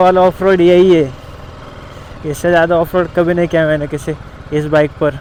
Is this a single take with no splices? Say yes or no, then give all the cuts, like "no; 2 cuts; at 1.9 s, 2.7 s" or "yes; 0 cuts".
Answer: yes; 0 cuts